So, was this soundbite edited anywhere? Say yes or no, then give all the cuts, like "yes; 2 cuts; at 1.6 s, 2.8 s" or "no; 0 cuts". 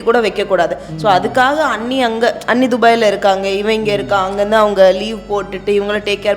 no; 0 cuts